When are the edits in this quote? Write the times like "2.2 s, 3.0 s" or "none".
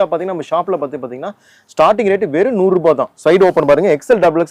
none